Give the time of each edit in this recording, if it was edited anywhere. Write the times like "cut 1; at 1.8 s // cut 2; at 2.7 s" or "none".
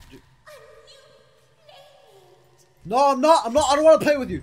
none